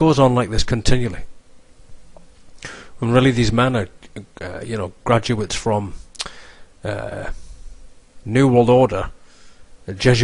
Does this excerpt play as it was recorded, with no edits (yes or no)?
yes